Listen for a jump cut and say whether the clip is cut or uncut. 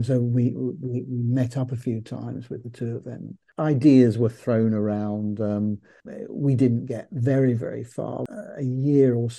cut